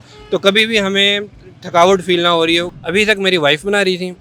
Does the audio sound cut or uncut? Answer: cut